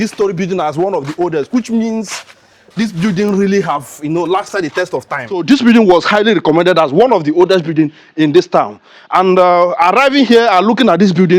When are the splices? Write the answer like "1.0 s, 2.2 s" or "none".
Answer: 5.4 s